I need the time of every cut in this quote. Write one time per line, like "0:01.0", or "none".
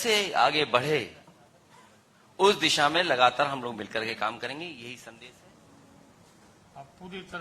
0:05.1